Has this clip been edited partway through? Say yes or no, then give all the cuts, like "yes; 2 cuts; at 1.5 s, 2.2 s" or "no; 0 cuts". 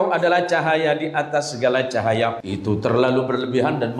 yes; 1 cut; at 2.4 s